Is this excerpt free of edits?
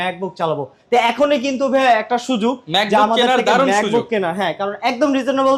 yes; 0 cuts

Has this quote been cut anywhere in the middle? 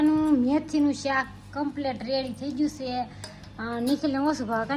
no; 0 cuts

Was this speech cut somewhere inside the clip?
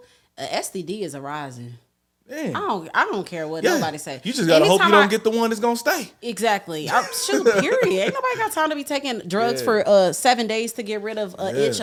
no; 0 cuts

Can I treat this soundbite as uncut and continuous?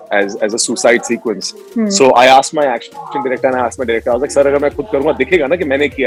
yes; 0 cuts

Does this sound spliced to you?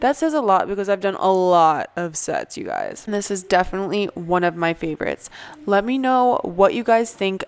no; 0 cuts

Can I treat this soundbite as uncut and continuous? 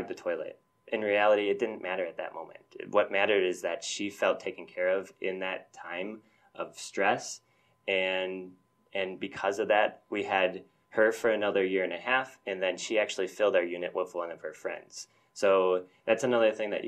yes; 0 cuts

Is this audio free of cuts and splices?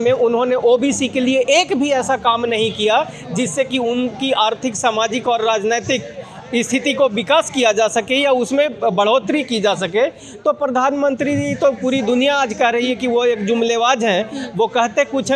yes; 0 cuts

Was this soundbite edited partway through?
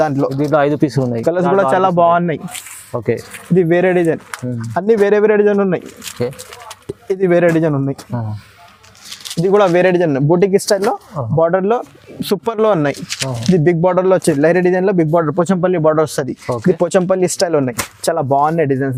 no; 0 cuts

